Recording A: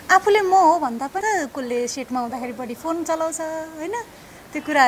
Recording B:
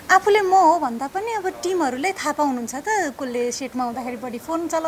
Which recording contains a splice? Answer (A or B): A